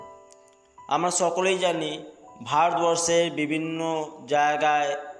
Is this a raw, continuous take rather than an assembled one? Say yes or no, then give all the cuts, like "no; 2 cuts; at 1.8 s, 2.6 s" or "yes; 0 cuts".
yes; 0 cuts